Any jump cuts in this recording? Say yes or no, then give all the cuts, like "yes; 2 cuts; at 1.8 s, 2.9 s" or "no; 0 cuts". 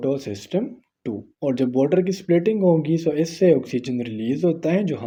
no; 0 cuts